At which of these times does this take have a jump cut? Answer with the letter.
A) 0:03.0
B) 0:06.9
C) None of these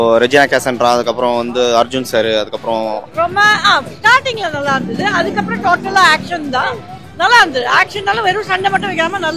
A